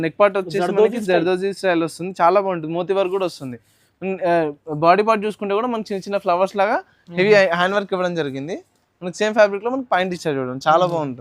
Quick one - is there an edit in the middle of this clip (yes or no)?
no